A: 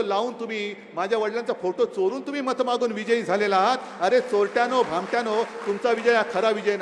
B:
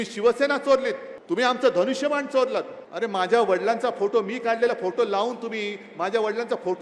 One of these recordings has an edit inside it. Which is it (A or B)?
B